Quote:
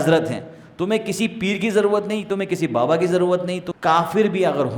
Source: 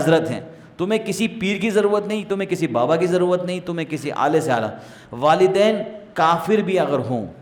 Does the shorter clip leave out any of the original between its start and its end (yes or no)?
yes